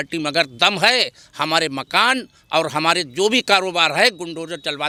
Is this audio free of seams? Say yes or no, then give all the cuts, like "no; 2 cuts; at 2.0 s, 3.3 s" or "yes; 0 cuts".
yes; 0 cuts